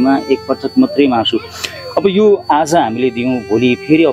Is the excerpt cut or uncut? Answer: uncut